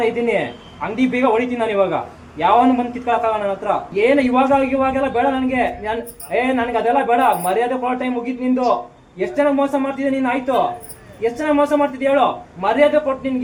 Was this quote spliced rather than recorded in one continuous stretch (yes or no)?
no